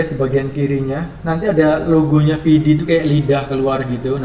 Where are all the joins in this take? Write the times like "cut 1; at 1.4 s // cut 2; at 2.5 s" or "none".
none

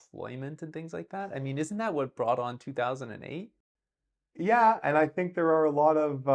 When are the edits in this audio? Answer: none

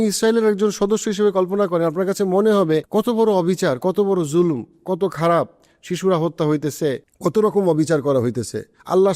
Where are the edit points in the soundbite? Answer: cut 1; at 2.9 s // cut 2; at 7.1 s

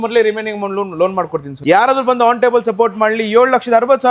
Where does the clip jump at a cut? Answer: cut 1; at 1.5 s

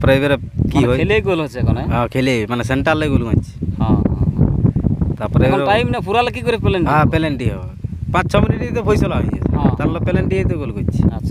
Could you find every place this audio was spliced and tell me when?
none

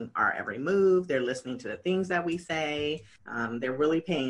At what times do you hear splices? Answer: none

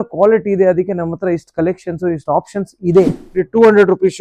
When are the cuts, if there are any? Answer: cut 1; at 3.2 s

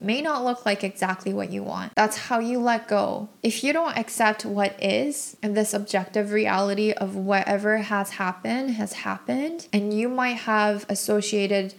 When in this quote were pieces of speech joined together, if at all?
cut 1; at 1.9 s

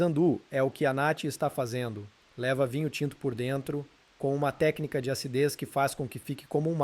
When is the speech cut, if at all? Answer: cut 1; at 4.0 s

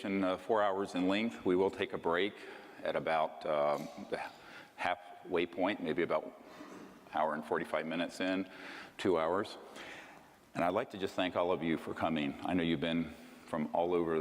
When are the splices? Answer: cut 1; at 13.2 s

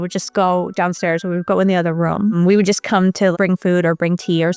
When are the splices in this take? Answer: cut 1; at 2.3 s

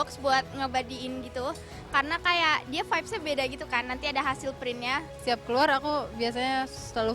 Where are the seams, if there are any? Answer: cut 1; at 5.1 s

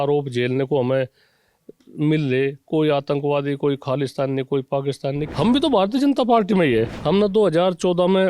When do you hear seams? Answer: cut 1; at 5.2 s // cut 2; at 7.0 s

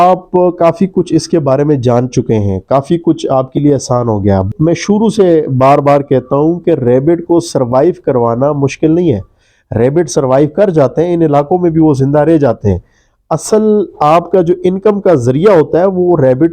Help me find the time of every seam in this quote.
cut 1; at 4.5 s

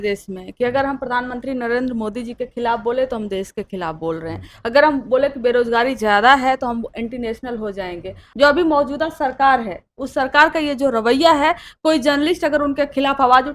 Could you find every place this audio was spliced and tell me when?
cut 1; at 8.2 s

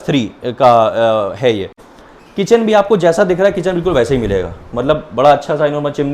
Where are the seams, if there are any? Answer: cut 1; at 1.8 s

